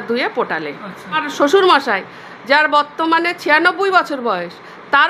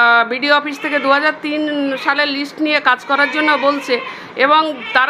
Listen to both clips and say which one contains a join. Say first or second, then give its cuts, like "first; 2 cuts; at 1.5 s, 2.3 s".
first; 1 cut; at 1.3 s